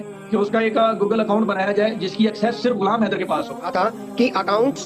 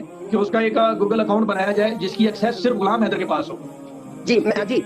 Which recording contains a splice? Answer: first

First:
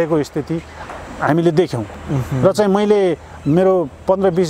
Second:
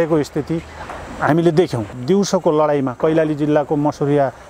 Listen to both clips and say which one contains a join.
second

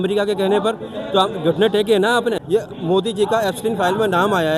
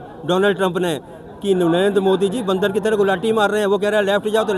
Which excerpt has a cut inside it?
first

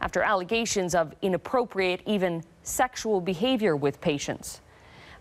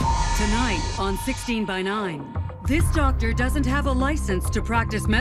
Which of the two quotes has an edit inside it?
first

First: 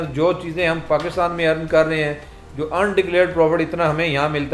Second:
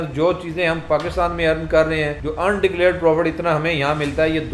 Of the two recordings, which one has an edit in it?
second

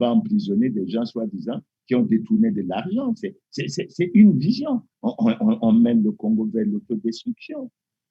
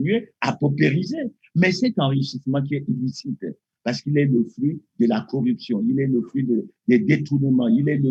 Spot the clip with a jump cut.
first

